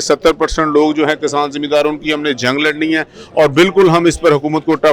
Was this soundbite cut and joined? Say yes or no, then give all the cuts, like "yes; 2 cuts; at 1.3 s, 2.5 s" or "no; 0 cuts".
no; 0 cuts